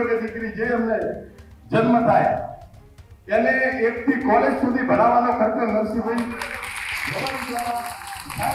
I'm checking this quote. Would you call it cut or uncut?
uncut